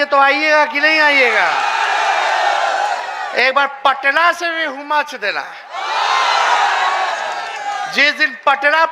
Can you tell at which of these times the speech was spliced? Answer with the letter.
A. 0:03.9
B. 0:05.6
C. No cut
C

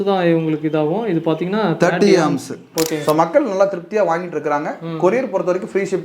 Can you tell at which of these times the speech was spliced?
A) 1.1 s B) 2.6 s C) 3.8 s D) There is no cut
B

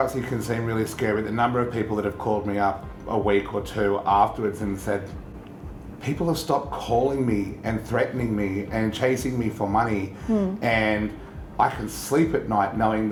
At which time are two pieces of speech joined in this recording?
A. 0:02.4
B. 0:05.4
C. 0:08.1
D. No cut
D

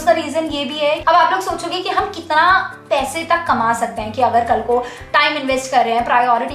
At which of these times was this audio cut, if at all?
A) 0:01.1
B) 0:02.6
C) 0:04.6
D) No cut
A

